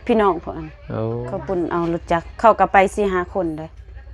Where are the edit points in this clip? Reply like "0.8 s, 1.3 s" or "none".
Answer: 1.3 s